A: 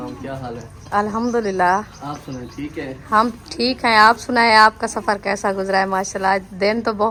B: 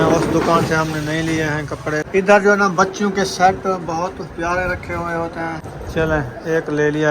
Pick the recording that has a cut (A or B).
B